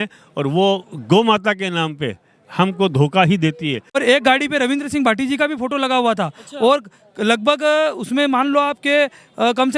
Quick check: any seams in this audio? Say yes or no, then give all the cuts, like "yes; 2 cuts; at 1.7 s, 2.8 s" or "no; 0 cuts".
yes; 1 cut; at 3.9 s